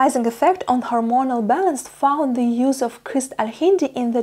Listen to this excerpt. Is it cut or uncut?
uncut